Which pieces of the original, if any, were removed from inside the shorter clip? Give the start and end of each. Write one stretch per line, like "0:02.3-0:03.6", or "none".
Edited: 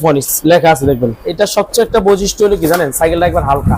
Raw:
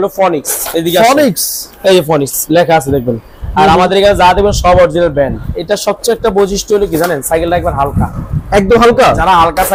0:03.3-0:05.5